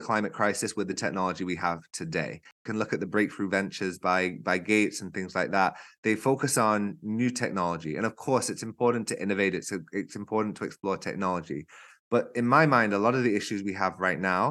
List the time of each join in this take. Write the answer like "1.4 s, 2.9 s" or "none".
2.6 s